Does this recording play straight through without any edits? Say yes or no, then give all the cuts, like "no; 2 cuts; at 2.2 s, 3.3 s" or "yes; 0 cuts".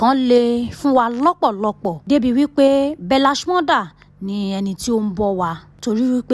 yes; 0 cuts